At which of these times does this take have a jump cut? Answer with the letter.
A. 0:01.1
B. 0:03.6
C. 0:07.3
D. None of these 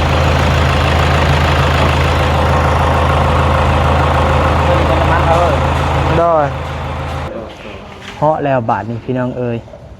C